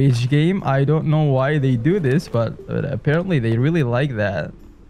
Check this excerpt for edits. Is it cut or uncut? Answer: uncut